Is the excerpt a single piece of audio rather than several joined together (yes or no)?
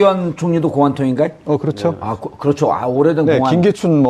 yes